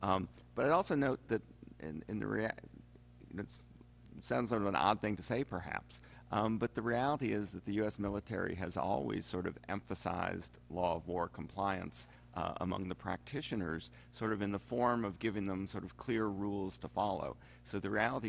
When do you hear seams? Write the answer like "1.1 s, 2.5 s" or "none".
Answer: 15.5 s